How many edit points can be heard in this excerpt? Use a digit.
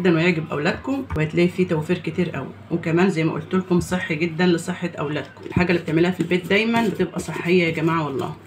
2